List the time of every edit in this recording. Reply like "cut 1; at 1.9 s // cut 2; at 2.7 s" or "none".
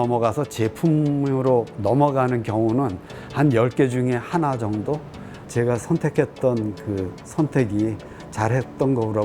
cut 1; at 5.3 s